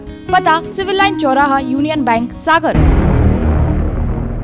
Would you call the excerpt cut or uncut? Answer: cut